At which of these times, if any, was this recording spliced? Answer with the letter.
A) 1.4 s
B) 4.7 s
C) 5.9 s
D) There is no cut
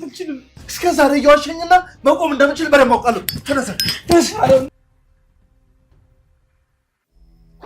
B